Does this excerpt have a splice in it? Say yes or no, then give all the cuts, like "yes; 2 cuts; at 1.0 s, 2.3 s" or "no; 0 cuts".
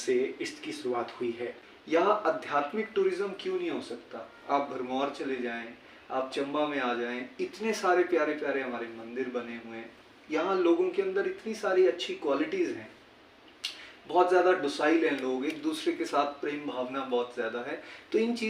yes; 1 cut; at 1.7 s